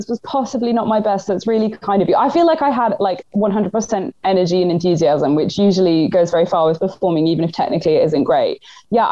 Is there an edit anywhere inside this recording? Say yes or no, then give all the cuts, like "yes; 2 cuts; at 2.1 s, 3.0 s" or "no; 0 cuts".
no; 0 cuts